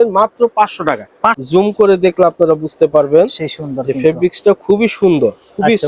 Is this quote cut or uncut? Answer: cut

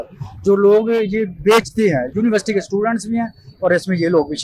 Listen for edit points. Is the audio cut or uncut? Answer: uncut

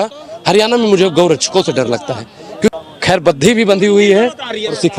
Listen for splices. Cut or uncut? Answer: uncut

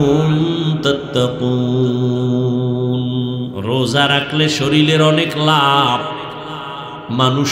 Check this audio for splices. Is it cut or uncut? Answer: cut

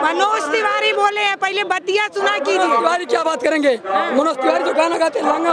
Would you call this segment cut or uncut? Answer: uncut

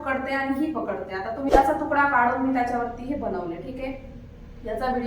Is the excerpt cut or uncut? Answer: cut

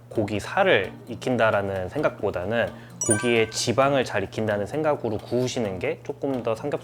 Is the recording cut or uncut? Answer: uncut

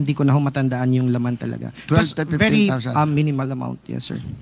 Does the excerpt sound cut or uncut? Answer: uncut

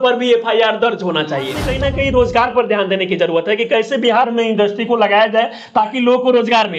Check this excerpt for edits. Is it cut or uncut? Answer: cut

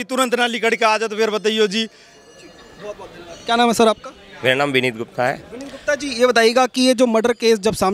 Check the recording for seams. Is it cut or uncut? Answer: uncut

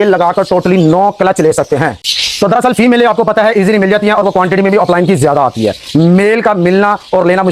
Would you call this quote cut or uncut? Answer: uncut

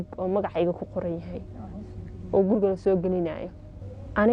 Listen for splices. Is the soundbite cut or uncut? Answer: uncut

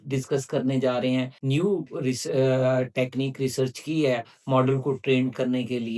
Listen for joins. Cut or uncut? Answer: cut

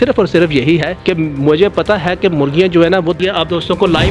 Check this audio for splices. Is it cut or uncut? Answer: cut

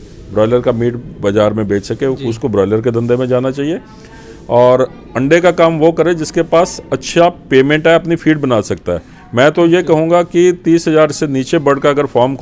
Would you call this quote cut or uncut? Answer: uncut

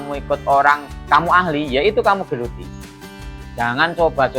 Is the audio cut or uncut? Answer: cut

